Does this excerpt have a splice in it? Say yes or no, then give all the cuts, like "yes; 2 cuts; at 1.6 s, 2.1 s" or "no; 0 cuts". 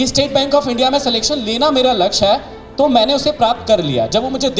no; 0 cuts